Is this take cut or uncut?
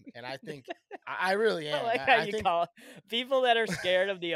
uncut